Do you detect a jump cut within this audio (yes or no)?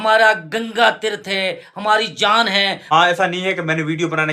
yes